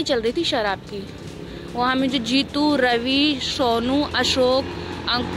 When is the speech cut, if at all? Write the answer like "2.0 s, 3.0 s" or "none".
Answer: none